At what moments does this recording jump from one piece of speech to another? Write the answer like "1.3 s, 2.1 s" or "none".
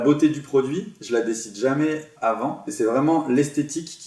0.9 s, 2.6 s